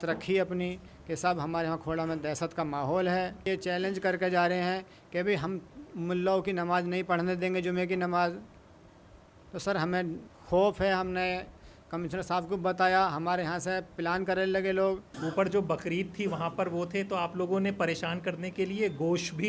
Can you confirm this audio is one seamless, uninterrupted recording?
no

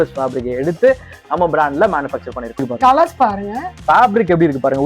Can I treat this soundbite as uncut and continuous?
no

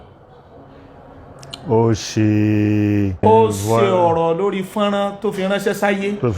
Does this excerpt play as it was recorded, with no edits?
no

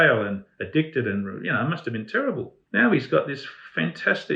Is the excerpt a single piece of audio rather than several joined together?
no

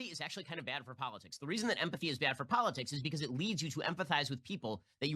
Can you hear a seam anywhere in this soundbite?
no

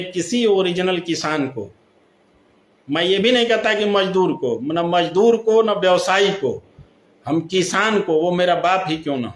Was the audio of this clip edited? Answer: no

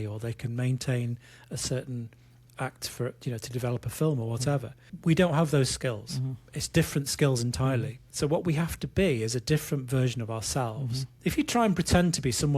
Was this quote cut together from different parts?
yes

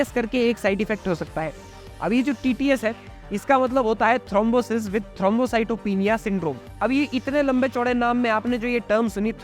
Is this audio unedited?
yes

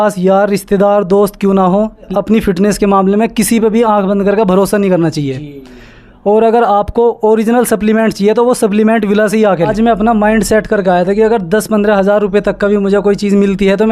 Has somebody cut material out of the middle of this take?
yes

